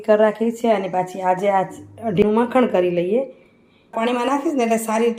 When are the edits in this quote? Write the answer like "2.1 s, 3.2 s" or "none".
2.2 s, 3.9 s